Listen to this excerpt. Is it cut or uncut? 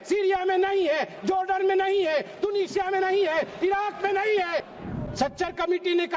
cut